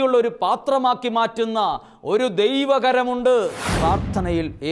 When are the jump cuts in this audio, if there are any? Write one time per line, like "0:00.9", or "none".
0:03.6